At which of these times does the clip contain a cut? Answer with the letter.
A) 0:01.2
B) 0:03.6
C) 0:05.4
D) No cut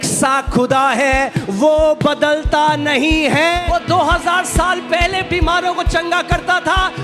B